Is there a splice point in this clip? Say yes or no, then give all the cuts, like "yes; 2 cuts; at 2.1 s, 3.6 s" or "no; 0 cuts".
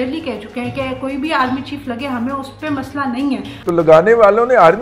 yes; 1 cut; at 3.5 s